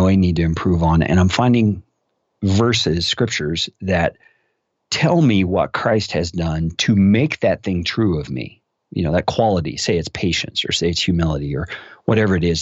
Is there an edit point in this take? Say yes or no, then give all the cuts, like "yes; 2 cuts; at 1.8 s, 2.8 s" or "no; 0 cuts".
no; 0 cuts